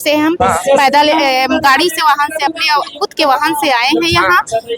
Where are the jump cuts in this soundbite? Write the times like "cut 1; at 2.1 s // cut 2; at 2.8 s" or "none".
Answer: none